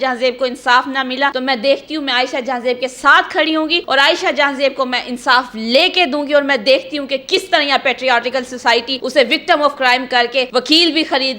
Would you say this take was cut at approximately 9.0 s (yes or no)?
yes